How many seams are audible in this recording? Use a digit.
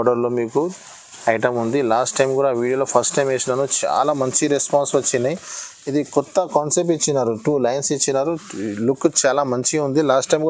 0